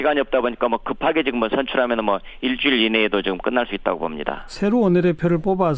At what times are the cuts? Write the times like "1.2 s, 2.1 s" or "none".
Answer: none